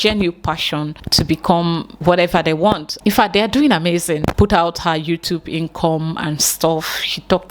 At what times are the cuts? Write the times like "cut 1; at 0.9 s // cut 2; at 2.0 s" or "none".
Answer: cut 1; at 1.0 s // cut 2; at 2.9 s // cut 3; at 4.3 s